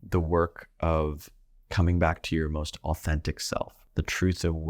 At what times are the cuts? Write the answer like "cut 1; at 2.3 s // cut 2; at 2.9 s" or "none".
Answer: cut 1; at 3.8 s